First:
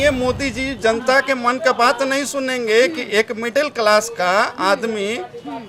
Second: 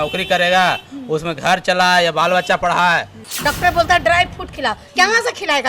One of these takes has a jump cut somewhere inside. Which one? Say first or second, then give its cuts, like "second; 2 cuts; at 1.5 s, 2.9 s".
second; 1 cut; at 3.2 s